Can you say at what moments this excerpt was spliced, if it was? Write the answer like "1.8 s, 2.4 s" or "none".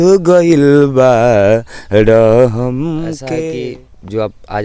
3.6 s